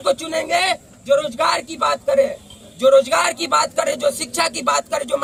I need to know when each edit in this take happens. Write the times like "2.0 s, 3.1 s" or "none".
none